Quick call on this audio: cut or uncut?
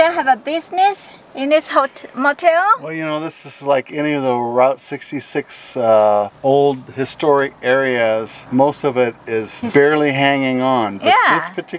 cut